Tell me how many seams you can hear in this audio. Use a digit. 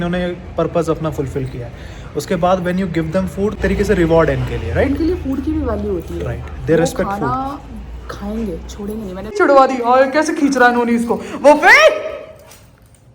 2